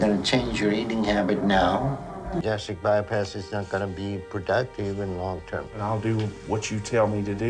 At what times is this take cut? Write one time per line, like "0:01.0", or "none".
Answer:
0:02.4
0:04.0